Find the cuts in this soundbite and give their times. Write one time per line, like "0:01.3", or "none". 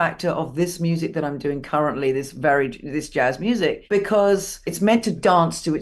0:03.8
0:04.7